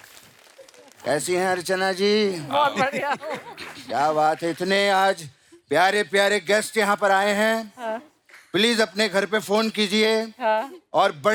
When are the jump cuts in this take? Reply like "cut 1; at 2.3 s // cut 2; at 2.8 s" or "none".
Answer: none